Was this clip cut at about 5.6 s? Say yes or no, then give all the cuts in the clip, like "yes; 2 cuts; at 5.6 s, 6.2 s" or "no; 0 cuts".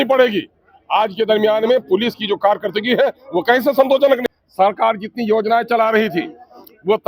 no; 1 cut; at 4.2 s